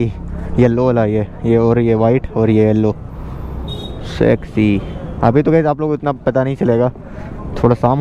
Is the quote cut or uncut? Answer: uncut